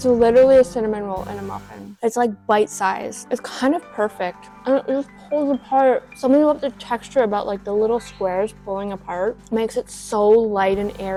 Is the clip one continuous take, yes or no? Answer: yes